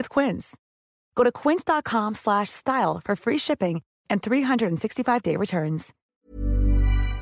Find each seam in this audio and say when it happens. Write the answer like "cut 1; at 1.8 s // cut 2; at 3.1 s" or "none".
cut 1; at 5.9 s

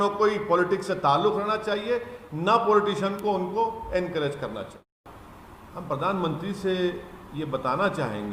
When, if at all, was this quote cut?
cut 1; at 5.0 s

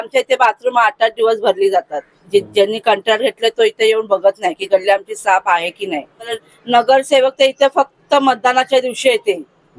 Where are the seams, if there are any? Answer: cut 1; at 6.4 s

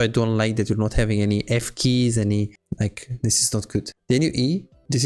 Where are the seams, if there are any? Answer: cut 1; at 2.6 s // cut 2; at 3.9 s

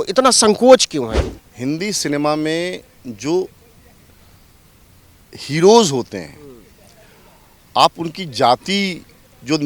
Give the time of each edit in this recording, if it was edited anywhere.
cut 1; at 1.2 s

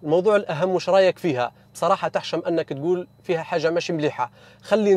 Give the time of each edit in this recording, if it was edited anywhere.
none

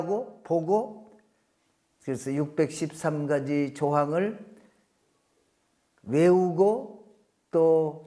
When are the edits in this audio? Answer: none

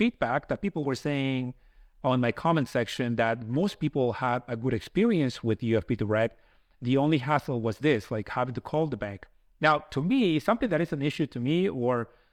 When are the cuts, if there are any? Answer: none

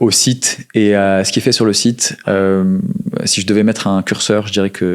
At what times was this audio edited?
none

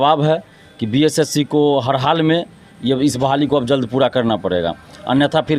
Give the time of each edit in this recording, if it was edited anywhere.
none

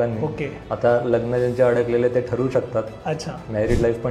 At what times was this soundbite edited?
none

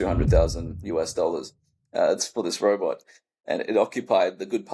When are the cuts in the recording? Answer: none

